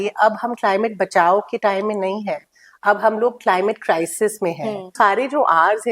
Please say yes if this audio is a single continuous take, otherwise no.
no